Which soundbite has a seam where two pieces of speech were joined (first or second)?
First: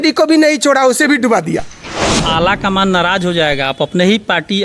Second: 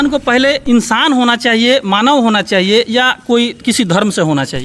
first